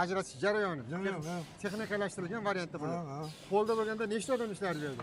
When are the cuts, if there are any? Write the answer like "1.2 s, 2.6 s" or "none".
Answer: none

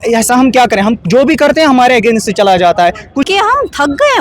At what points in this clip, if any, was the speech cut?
3.2 s

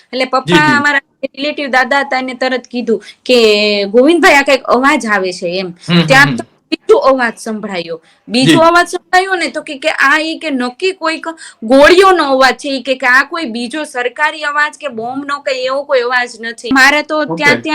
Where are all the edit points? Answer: 16.7 s

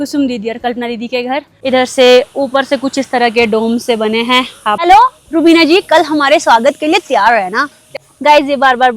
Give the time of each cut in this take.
1.5 s, 4.8 s, 7.8 s

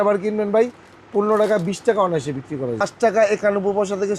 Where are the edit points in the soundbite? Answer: 2.8 s

